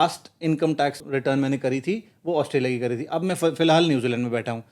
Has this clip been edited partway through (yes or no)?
yes